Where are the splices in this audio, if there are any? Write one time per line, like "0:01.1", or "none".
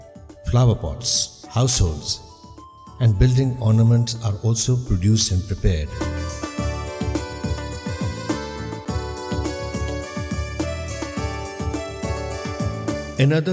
none